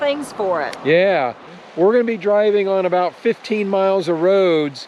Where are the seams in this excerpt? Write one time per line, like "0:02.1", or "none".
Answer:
0:01.5